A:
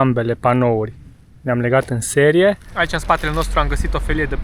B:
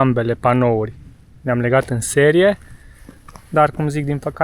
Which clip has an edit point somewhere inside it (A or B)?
A